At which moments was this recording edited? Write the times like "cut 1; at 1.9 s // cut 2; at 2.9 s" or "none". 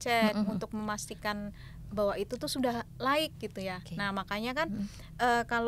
none